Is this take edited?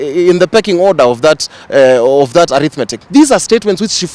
yes; 1 cut; at 2.9 s

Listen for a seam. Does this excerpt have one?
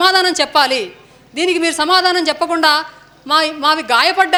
no; 0 cuts

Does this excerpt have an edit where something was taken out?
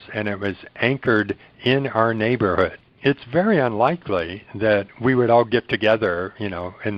yes; 1 cut; at 2.8 s

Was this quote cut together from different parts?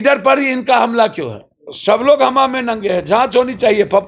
yes; 1 cut; at 1.7 s

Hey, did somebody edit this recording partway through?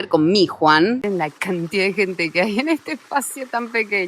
yes; 1 cut; at 1.0 s

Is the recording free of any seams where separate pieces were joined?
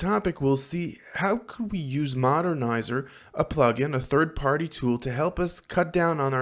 yes; 0 cuts

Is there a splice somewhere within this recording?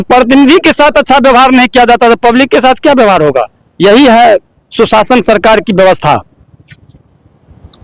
no; 0 cuts

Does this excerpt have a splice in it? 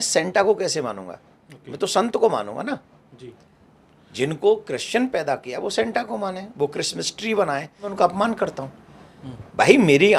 yes; 1 cut; at 7.9 s

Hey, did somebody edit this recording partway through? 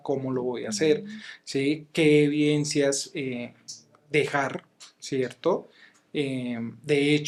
no; 0 cuts

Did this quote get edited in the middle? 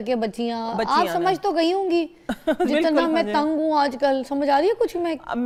no; 0 cuts

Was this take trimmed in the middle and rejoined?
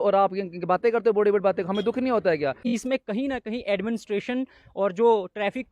yes; 1 cut; at 2.7 s

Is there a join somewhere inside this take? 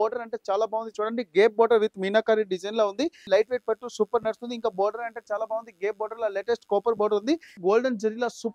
yes; 2 cuts; at 3.2 s, 7.5 s

